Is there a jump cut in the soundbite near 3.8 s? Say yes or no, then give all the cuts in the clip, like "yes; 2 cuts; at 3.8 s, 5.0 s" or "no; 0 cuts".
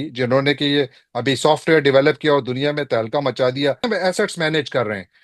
yes; 1 cut; at 3.8 s